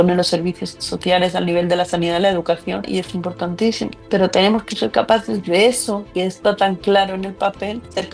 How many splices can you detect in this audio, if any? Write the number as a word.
one